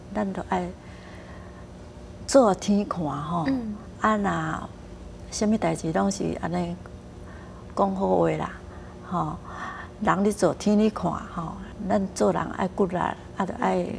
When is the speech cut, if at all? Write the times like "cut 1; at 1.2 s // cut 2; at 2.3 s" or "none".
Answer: cut 1; at 11.7 s